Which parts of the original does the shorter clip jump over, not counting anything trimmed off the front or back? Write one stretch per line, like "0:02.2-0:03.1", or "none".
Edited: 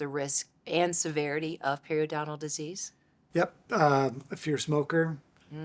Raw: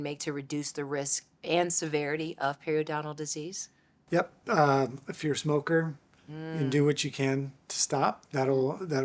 none